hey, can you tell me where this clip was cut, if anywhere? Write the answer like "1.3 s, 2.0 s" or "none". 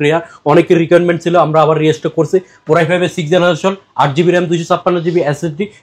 none